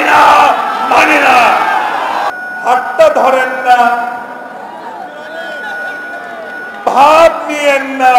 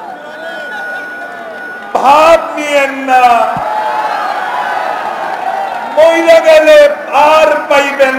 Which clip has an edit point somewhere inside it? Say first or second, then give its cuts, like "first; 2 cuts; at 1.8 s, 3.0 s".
first; 1 cut; at 2.4 s